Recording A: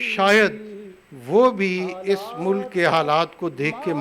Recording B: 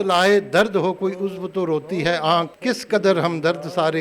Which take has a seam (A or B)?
B